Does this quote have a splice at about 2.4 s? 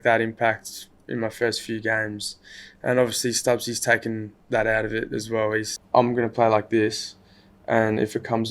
no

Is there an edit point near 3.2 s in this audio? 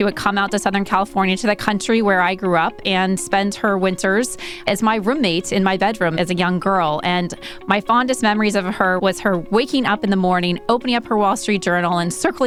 no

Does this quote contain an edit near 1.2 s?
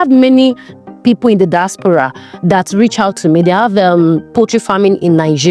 no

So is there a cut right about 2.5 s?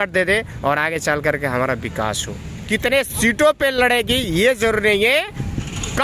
yes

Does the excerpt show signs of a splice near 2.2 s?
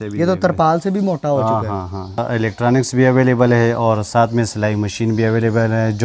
yes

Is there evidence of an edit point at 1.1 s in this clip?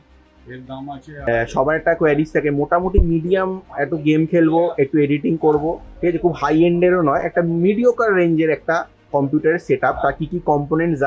yes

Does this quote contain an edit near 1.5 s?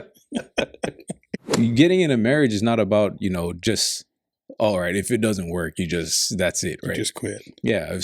yes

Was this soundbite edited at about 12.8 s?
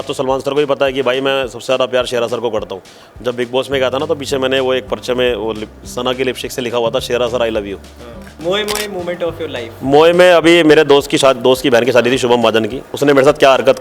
yes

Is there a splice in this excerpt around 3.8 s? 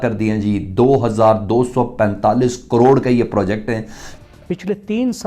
yes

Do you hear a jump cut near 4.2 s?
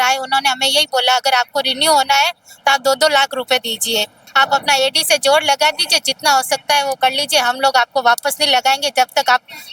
yes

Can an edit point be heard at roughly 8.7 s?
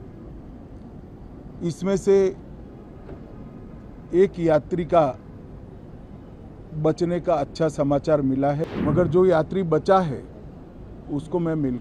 yes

